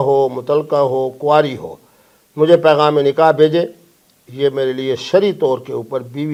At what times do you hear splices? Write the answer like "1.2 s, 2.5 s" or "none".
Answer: none